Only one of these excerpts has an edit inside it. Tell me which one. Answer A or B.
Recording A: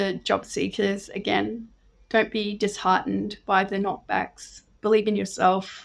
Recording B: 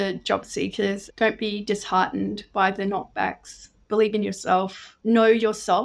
B